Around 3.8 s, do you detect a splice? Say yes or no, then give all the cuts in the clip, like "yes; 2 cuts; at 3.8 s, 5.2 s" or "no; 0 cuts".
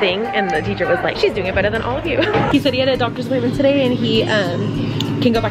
no; 2 cuts; at 1.1 s, 2.5 s